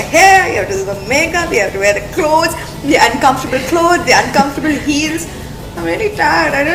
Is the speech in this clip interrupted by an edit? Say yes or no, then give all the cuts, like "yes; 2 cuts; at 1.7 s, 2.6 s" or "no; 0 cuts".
no; 0 cuts